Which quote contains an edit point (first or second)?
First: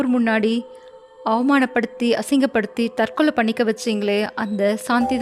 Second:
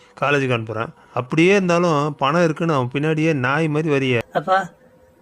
second